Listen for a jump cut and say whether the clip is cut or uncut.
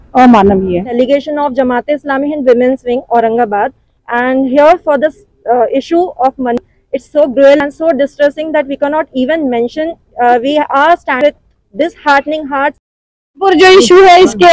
cut